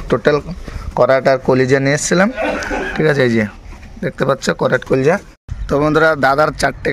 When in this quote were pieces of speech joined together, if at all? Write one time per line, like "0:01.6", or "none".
0:05.5

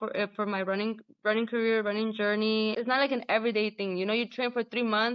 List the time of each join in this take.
0:02.8

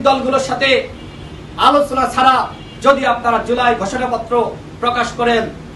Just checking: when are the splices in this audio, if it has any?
none

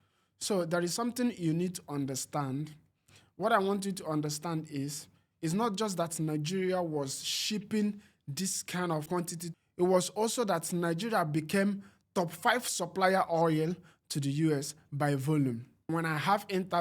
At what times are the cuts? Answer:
0:15.9

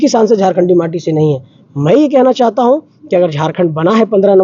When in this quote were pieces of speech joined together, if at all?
none

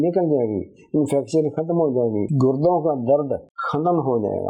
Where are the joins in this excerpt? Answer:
0:03.6

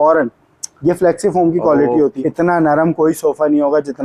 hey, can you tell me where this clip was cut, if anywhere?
0:02.2

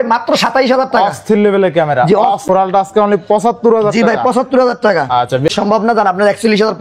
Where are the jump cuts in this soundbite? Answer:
0:02.4
0:05.5

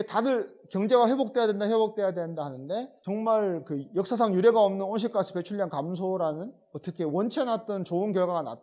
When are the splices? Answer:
0:02.9

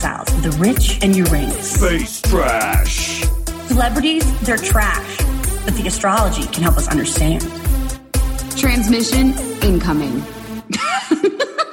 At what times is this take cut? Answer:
none

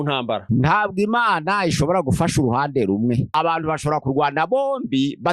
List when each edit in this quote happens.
0:03.3

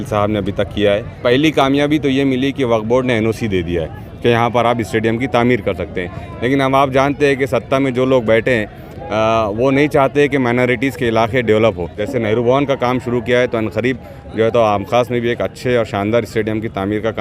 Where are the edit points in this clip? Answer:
0:01.2
0:12.0

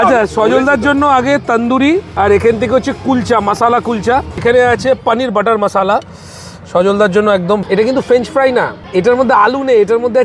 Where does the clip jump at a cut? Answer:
0:02.1
0:04.3
0:07.6

